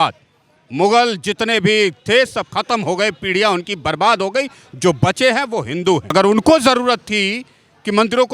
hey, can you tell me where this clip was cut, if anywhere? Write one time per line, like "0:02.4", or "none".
0:06.1